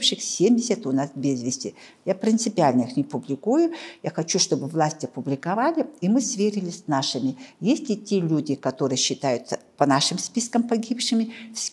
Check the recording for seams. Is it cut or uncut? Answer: uncut